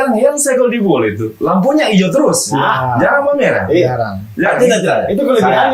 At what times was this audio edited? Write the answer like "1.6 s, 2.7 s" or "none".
none